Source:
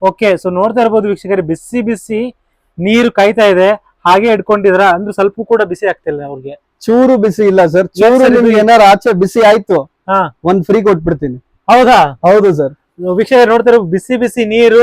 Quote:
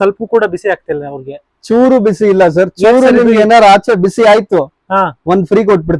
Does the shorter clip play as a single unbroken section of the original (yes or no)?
yes